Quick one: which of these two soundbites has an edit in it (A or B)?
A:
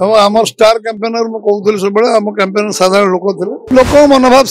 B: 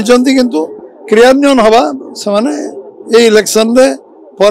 A